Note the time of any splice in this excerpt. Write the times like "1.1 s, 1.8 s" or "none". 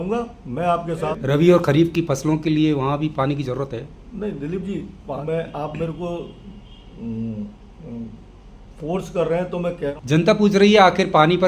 1.1 s, 5.2 s, 9.9 s